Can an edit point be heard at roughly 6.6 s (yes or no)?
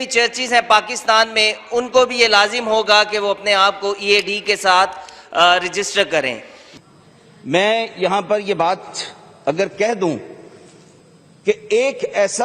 yes